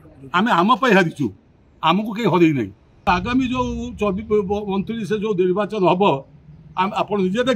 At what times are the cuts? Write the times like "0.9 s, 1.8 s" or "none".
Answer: 3.1 s